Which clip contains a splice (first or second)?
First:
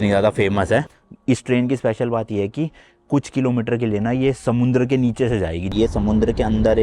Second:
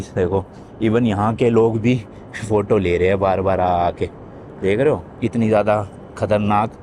first